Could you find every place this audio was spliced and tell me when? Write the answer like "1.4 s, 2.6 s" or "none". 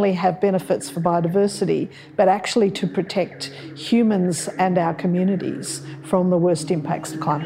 none